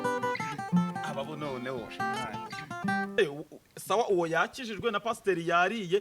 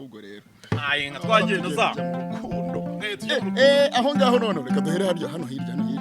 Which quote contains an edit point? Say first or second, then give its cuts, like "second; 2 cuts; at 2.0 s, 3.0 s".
first; 1 cut; at 3.2 s